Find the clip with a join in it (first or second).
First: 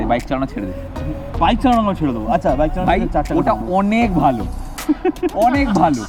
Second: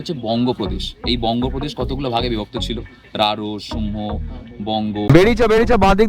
second